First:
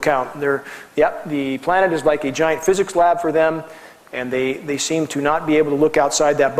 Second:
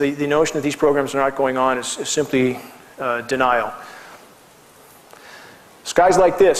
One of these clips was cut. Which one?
second; 1 cut; at 2.5 s

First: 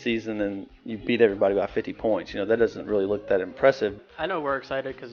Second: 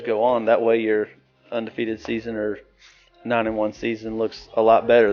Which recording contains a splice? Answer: first; 1 cut; at 3.9 s

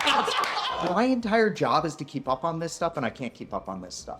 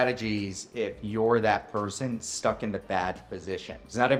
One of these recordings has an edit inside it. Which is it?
first; 1 cut; at 0.9 s

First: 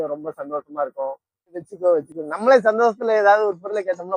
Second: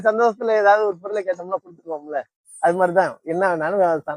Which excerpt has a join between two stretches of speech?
first; 1 cut; at 1.6 s

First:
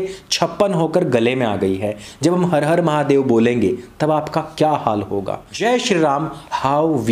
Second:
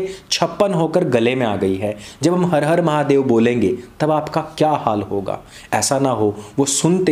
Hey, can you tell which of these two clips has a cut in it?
first; 1 cut; at 5.4 s

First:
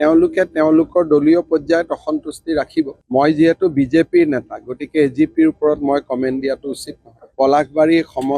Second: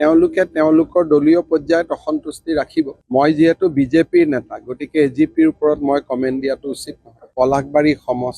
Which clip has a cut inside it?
first; 1 cut; at 7.3 s

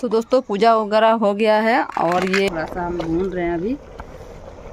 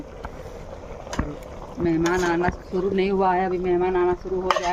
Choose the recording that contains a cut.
first; 1 cut; at 2.5 s

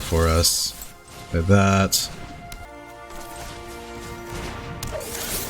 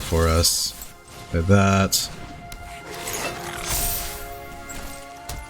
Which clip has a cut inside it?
first; 1 cut; at 2.6 s

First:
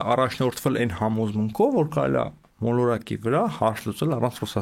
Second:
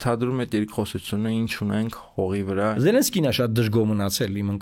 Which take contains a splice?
second; 1 cut; at 2.8 s

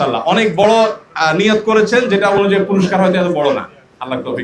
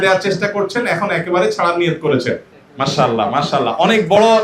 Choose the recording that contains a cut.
second; 1 cut; at 2.5 s

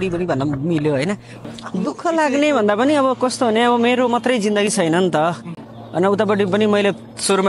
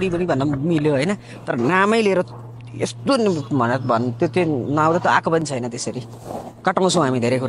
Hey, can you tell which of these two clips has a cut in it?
first; 1 cut; at 1.4 s

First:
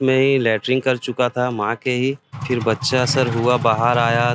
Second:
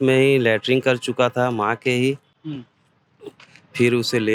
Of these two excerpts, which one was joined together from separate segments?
first; 1 cut; at 2.6 s

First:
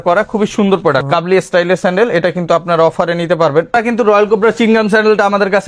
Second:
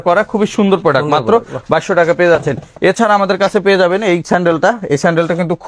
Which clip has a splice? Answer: first; 2 cuts; at 1.0 s, 3.9 s

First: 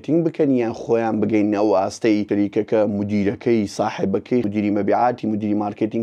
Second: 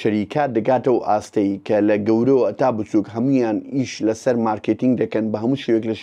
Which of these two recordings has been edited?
first; 2 cuts; at 2.2 s, 4.5 s

